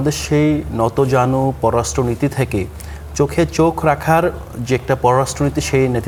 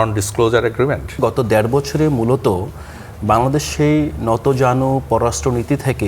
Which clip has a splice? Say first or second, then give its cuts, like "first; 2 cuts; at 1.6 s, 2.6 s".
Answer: second; 1 cut; at 1.2 s